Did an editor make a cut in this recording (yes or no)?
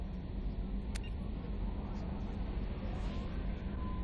no